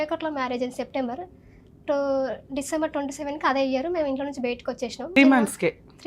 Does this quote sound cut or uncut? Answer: cut